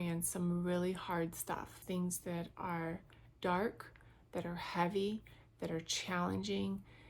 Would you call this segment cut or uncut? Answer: cut